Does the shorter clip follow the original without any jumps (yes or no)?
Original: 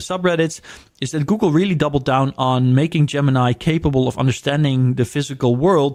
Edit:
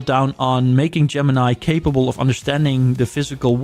yes